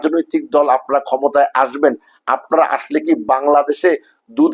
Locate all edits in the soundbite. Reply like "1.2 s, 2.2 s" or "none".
none